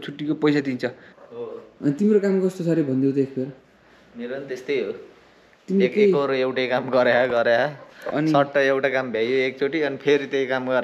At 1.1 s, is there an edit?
yes; 1 cut; at 1.1 s

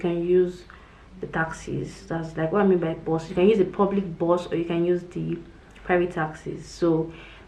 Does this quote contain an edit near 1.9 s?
no; 0 cuts

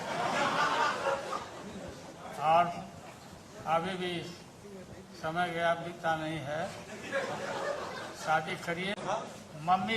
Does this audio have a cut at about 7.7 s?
no; 1 cut; at 8.9 s

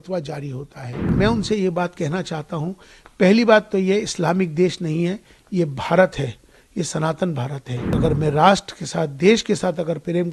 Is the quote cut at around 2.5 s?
no; 2 cuts; at 1.1 s, 8.0 s

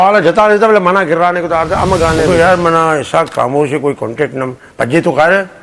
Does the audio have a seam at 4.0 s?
no; 1 cut; at 2.2 s

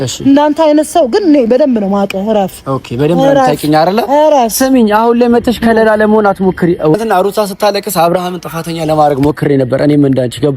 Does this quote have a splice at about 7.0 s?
yes; 1 cut; at 7.0 s

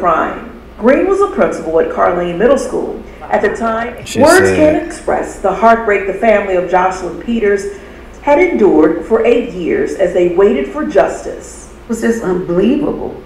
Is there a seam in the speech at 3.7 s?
yes; 1 cut; at 3.7 s

